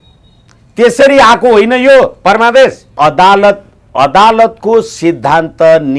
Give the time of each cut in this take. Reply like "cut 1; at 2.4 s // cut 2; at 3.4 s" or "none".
cut 1; at 2.9 s